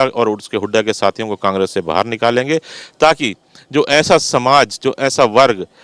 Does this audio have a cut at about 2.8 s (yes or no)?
no